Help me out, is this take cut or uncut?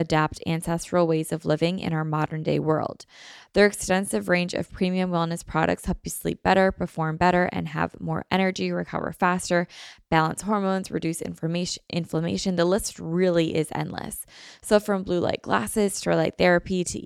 uncut